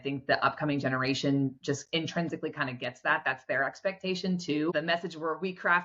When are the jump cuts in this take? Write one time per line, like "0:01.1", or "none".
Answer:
0:04.7